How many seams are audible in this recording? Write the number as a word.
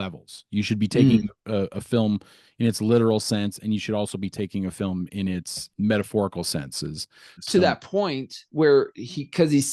one